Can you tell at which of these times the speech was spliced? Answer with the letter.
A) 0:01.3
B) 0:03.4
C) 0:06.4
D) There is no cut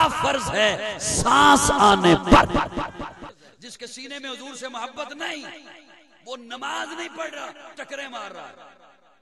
B